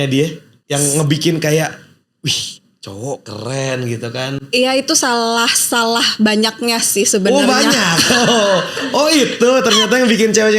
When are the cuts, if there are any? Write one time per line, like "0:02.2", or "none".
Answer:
none